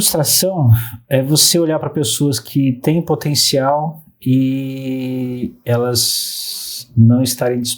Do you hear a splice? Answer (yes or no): no